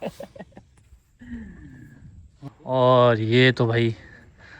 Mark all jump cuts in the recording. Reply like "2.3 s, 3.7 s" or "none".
2.3 s